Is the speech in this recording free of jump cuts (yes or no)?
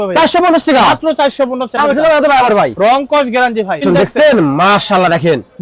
no